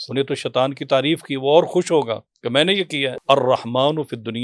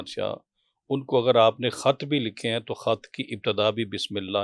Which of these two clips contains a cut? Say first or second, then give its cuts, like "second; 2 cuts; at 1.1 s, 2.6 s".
first; 1 cut; at 3.1 s